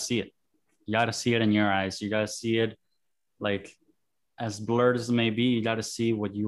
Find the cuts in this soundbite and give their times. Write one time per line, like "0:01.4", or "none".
none